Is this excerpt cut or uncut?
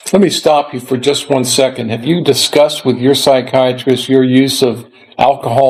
uncut